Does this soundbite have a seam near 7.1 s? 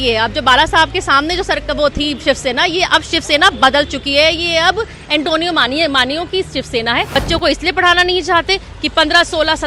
yes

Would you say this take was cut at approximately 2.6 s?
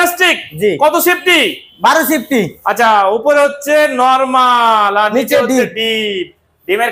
no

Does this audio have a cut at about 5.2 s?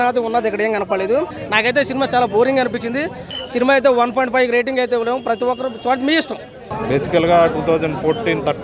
no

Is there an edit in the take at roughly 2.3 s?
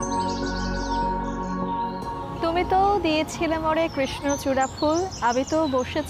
yes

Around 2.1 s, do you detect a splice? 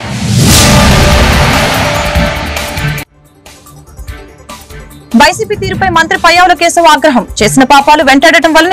no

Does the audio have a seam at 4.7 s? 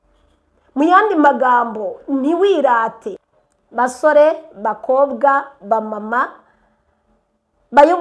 no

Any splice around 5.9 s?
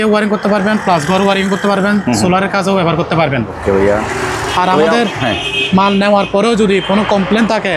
no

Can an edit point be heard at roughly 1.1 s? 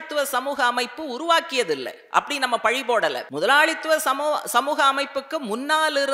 no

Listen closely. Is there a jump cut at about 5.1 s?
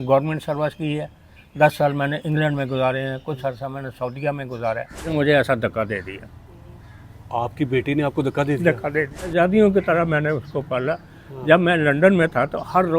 yes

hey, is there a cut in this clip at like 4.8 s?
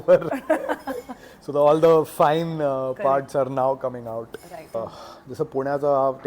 yes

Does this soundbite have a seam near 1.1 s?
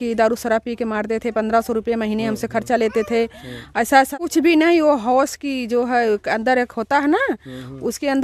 no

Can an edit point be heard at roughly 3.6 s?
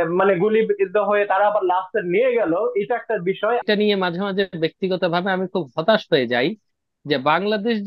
yes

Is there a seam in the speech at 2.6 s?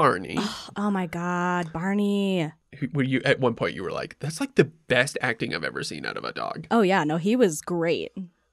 yes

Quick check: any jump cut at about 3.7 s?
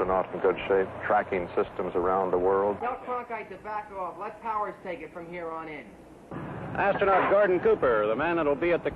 no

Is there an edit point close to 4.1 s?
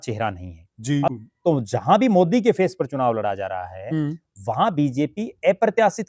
no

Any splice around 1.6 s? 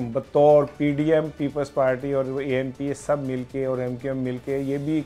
no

